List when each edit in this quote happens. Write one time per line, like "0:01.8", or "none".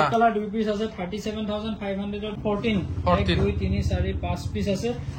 0:02.4